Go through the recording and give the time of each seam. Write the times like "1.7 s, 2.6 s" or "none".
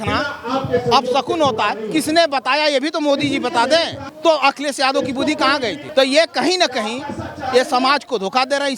4.0 s, 5.9 s